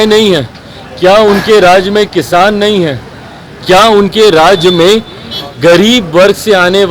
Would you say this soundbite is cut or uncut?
uncut